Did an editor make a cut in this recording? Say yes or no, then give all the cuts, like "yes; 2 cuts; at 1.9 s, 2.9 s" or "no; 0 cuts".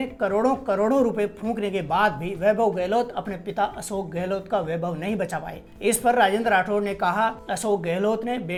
no; 0 cuts